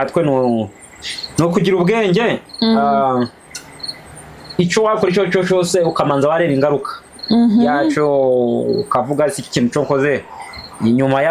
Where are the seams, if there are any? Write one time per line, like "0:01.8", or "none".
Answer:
none